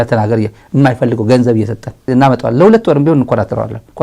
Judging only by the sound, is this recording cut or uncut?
cut